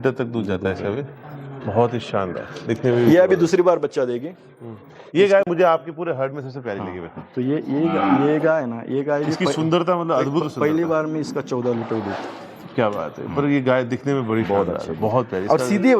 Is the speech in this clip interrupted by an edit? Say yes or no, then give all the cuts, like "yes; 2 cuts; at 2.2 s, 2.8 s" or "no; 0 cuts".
no; 0 cuts